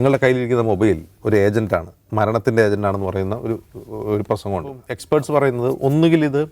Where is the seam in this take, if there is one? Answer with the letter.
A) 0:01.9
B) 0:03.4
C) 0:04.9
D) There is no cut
C